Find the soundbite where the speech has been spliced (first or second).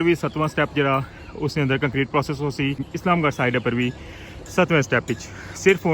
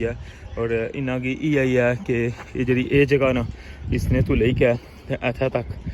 first